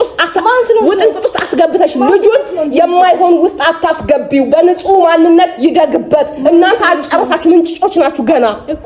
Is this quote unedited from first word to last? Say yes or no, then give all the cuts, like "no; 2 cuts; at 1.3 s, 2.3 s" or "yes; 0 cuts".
yes; 0 cuts